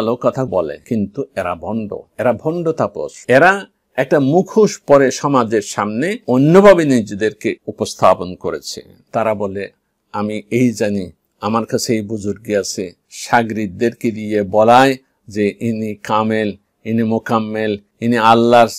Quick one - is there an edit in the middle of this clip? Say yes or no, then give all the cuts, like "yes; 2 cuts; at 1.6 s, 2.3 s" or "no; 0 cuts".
yes; 2 cuts; at 7.7 s, 17.9 s